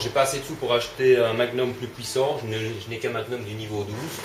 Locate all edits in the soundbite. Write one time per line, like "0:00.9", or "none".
0:03.2

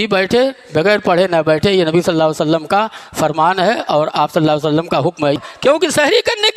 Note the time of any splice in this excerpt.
0:05.4

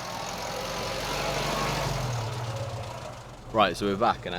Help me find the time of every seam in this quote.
0:03.3

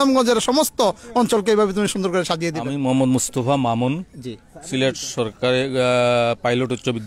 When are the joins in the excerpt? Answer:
0:02.7

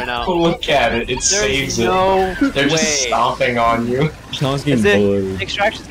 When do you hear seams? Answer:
none

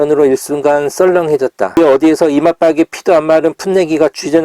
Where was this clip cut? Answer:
0:01.8

